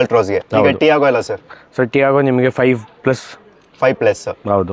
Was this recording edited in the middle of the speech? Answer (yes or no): no